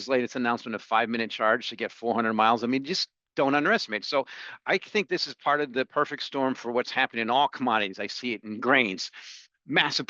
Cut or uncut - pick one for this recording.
uncut